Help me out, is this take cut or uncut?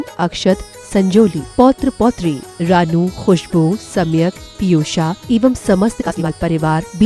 cut